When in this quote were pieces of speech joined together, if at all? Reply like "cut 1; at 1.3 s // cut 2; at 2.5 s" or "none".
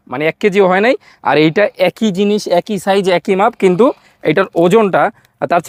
none